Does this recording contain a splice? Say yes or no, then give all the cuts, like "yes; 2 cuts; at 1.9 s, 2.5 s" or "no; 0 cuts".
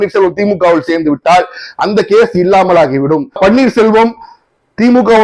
yes; 1 cut; at 3.4 s